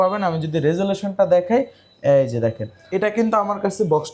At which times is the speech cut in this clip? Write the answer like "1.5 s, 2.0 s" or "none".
2.7 s